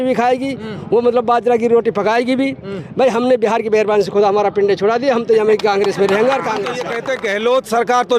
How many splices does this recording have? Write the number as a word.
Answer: one